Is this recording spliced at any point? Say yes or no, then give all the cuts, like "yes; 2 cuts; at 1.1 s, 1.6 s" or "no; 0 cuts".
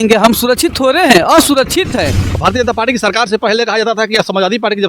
yes; 1 cut; at 2.2 s